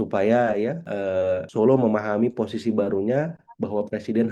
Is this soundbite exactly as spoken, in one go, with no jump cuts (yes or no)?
no